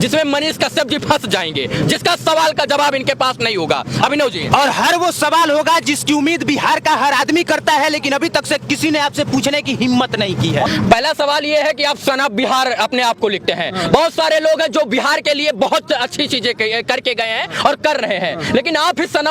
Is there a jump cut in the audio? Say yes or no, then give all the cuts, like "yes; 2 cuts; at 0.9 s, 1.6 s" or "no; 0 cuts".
no; 0 cuts